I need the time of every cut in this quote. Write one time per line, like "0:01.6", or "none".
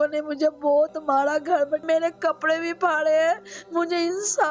0:01.8